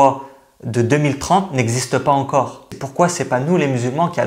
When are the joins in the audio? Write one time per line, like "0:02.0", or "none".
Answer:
0:02.8